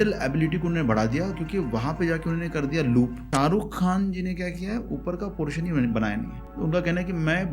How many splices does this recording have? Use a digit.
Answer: 2